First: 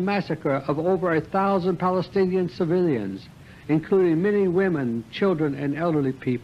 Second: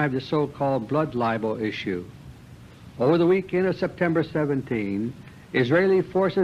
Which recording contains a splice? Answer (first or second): second